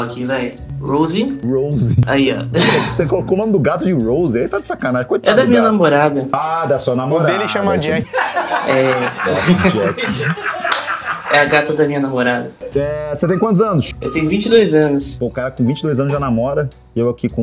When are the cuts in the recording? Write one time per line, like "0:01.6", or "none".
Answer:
none